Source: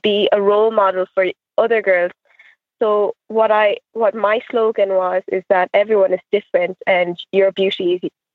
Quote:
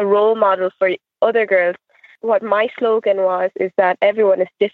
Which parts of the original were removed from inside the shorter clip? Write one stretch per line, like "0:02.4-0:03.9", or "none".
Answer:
0:02.5-0:03.9